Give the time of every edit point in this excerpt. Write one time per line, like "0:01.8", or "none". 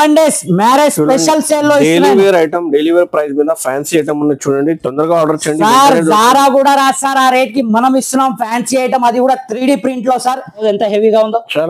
0:10.6